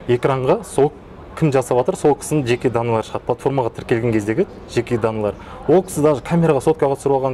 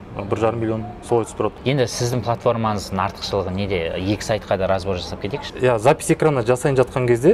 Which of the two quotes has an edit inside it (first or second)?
second